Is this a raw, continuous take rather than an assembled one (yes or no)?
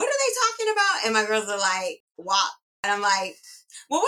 no